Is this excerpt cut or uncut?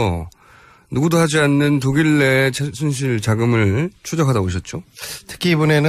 uncut